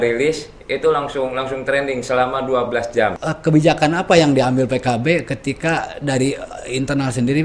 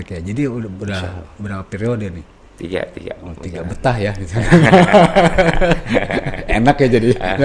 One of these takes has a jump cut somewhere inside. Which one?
first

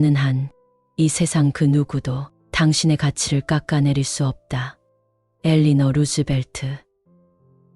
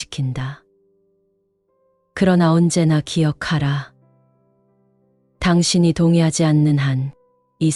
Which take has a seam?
first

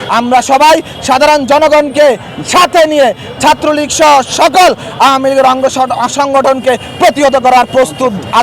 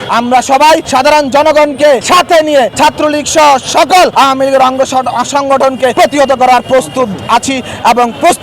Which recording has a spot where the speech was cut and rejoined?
second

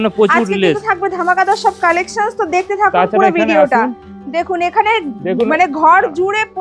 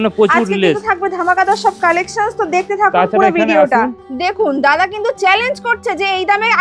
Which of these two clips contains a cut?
second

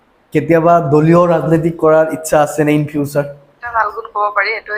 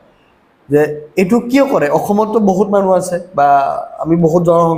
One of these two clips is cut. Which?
first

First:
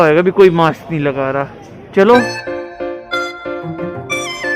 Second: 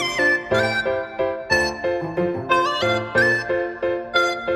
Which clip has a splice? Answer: first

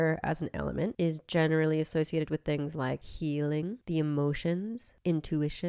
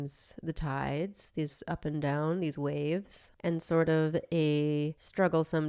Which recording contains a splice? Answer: first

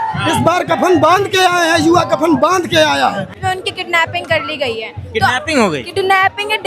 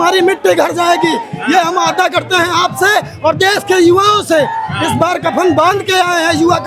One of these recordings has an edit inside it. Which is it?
first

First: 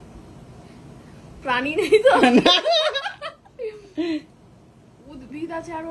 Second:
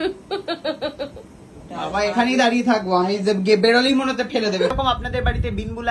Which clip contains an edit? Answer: second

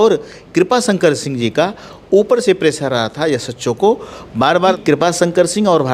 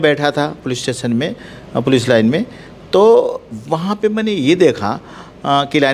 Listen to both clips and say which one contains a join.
first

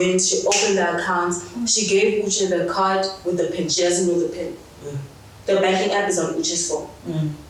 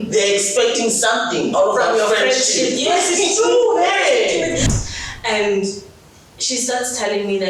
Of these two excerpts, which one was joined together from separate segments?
second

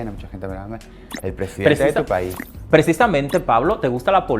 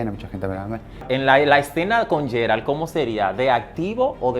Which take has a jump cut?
second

